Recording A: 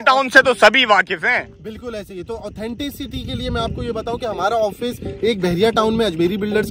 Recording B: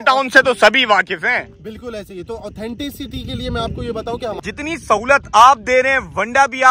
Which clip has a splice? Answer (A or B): B